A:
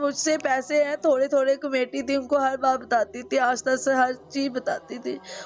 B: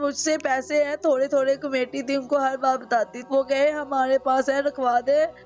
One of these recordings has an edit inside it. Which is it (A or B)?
B